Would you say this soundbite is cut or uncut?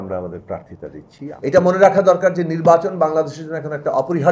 cut